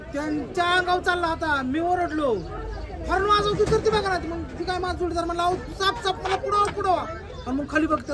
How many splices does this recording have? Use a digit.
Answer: 0